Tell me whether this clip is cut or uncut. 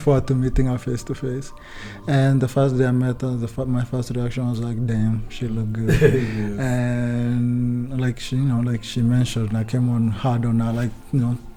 uncut